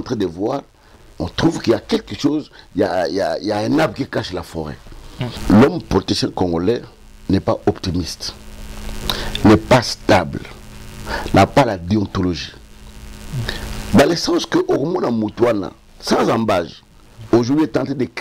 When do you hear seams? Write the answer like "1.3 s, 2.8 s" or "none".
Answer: 5.4 s